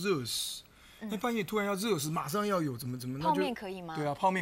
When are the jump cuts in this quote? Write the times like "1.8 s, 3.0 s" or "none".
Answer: none